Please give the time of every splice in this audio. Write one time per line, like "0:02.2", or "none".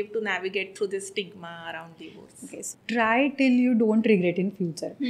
0:02.6